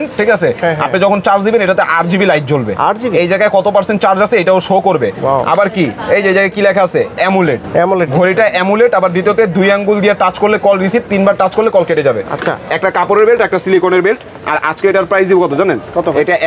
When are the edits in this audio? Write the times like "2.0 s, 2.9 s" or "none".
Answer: none